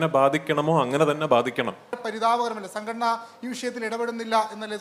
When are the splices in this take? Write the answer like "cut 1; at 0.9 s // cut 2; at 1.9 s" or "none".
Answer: cut 1; at 2.0 s